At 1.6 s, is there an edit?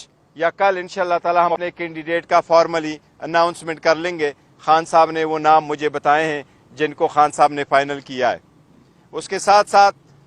yes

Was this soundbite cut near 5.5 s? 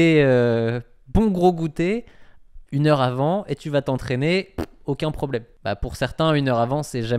yes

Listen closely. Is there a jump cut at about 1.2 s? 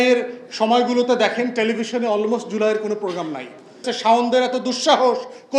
no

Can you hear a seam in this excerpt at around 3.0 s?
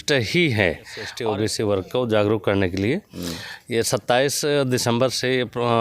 no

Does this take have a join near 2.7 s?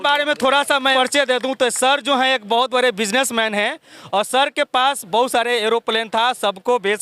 no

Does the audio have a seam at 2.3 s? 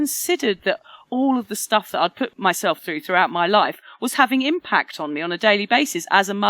yes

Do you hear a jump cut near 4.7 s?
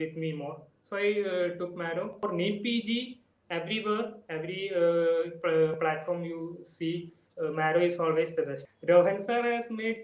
no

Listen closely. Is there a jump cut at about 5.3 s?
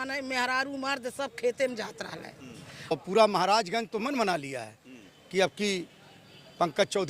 no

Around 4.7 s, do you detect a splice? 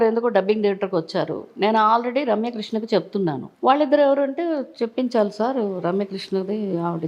no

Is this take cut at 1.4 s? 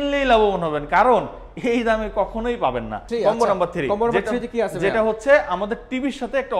no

